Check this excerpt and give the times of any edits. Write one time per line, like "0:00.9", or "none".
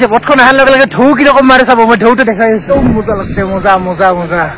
0:02.7